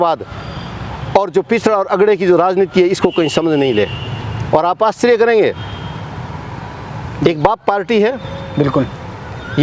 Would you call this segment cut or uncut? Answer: uncut